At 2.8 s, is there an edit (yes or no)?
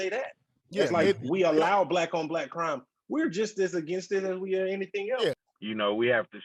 no